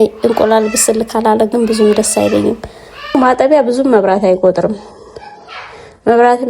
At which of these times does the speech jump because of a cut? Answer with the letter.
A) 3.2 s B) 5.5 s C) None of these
A